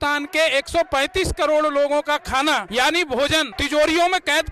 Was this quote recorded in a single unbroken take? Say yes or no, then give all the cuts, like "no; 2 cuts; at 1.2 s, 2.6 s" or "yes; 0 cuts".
no; 2 cuts; at 2.7 s, 3.6 s